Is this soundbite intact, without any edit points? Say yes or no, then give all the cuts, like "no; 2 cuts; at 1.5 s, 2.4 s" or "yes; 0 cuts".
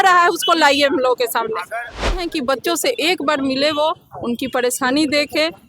no; 1 cut; at 2.2 s